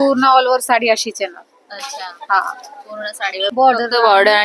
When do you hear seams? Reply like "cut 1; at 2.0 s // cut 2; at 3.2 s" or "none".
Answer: cut 1; at 3.5 s